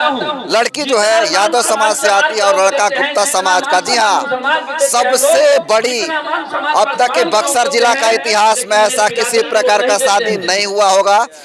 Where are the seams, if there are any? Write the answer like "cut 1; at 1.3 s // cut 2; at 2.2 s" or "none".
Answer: none